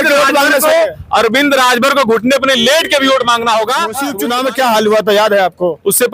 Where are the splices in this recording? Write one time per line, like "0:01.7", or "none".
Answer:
0:04.1